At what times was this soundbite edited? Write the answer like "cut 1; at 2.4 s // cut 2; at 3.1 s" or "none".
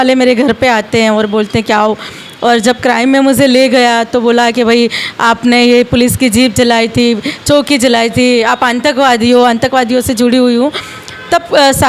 none